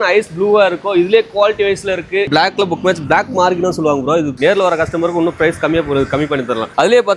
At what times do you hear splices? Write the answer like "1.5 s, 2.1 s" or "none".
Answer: 2.3 s, 4.3 s